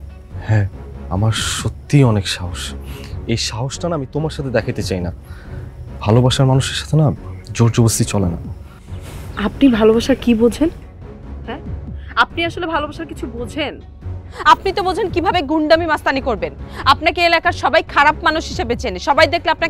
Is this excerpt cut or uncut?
uncut